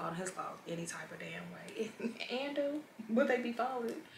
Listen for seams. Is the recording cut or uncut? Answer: uncut